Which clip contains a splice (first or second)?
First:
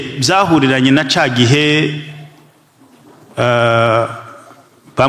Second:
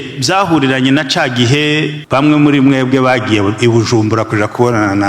second